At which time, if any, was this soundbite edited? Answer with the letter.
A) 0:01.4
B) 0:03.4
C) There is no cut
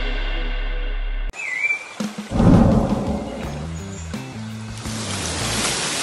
C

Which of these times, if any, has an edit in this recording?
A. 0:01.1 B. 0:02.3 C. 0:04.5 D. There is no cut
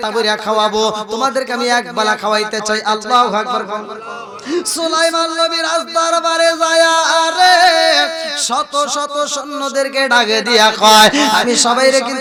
D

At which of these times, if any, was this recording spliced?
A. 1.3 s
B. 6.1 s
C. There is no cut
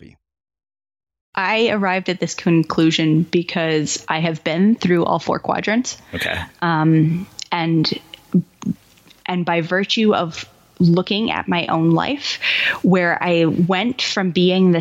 A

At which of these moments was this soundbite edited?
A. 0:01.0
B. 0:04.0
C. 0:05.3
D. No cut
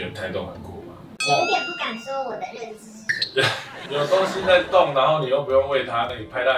A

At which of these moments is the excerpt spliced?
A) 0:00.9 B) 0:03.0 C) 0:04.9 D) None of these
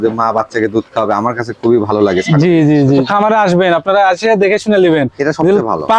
B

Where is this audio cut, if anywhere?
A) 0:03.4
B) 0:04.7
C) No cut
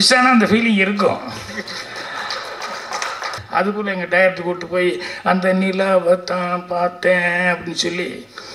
A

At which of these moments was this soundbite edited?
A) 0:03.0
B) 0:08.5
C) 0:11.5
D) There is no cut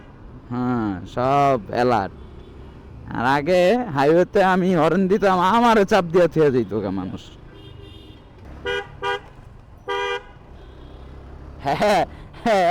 B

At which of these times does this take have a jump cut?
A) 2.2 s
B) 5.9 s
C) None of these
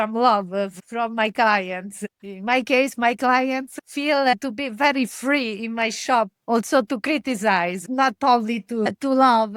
C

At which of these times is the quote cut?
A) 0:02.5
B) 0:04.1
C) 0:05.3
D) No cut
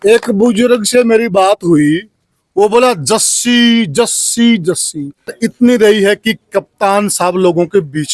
C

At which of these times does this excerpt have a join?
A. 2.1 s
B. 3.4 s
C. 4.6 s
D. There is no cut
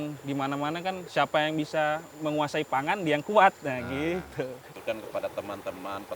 C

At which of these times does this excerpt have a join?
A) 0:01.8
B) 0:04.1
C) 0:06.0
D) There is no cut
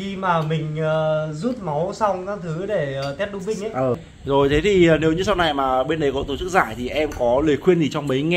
B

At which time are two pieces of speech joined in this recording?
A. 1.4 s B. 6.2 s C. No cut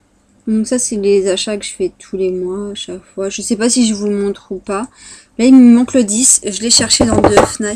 A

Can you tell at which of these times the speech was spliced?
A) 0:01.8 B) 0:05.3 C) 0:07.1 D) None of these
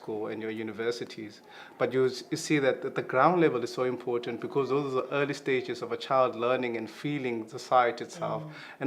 A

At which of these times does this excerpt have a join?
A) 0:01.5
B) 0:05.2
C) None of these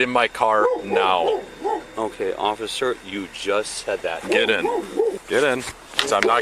B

